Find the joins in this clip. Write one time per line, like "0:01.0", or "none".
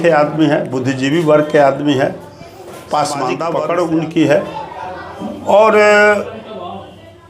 0:03.5